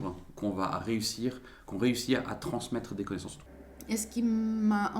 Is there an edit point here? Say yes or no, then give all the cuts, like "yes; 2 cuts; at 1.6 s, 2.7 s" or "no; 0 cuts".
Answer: yes; 1 cut; at 3.3 s